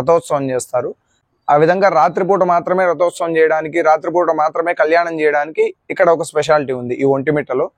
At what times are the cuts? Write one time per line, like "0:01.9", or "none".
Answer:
none